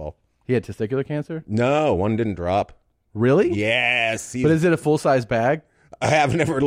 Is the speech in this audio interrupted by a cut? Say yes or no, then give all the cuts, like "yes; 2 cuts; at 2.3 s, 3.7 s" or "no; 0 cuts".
no; 0 cuts